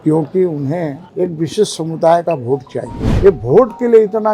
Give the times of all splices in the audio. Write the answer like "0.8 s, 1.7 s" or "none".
1.0 s, 3.0 s